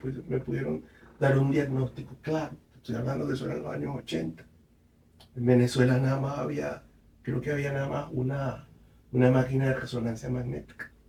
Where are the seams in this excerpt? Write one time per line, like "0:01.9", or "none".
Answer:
none